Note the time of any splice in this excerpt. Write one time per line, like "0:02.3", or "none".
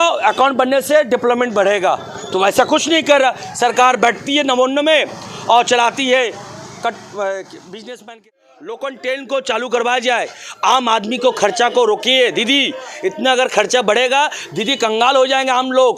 0:08.0